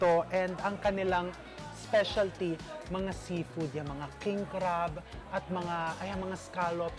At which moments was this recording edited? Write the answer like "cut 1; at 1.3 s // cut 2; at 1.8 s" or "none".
none